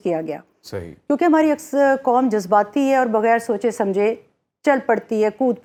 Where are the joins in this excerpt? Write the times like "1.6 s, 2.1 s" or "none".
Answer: none